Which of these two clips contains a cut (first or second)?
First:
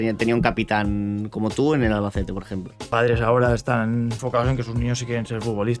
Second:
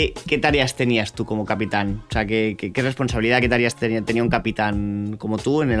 first